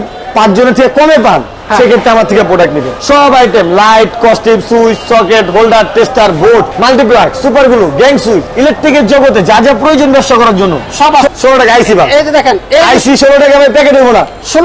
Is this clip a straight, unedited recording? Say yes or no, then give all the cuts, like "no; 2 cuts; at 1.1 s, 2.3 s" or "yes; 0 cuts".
no; 4 cuts; at 2.9 s, 6.7 s, 8.5 s, 11.3 s